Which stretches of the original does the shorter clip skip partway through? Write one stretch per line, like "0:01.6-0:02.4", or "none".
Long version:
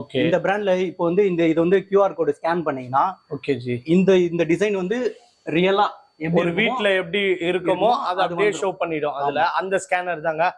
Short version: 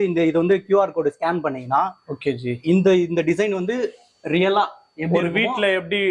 none